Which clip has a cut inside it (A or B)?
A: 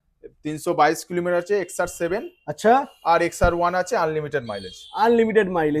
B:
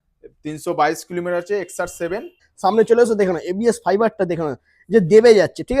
B